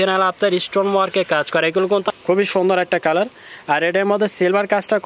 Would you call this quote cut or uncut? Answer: cut